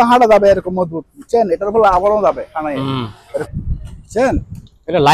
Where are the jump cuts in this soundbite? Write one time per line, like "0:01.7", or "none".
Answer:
0:03.5